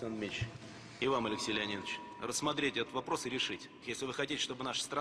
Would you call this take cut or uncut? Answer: cut